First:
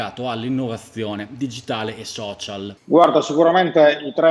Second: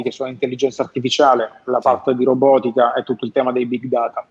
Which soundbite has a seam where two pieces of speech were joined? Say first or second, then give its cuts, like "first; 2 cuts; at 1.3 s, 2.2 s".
first; 1 cut; at 3.0 s